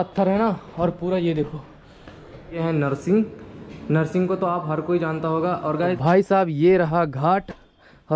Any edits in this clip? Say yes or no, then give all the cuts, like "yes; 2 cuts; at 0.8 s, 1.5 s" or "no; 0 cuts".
yes; 2 cuts; at 2.6 s, 5.8 s